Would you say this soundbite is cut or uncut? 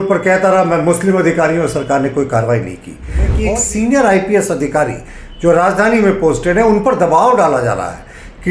cut